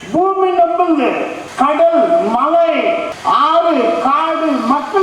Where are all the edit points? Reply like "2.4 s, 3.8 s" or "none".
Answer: 1.4 s, 3.1 s